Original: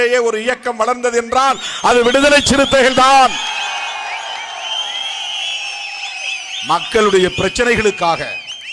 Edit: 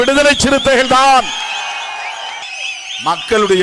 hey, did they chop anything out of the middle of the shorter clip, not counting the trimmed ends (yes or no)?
yes